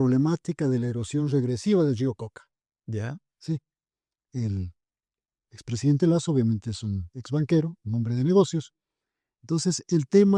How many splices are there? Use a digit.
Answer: 0